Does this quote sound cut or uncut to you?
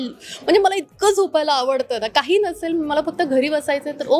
uncut